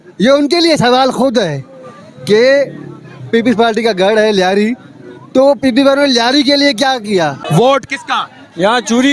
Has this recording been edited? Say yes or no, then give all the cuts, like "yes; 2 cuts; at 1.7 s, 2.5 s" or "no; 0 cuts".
yes; 1 cut; at 7.4 s